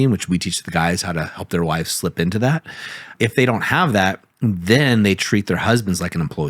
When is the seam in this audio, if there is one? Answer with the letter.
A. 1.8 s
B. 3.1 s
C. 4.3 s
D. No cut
B